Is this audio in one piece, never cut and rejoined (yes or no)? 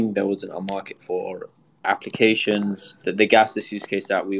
no